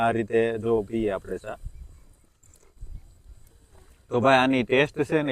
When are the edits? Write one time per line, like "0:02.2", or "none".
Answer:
none